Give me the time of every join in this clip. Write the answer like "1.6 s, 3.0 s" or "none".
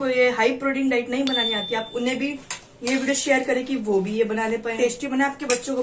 4.7 s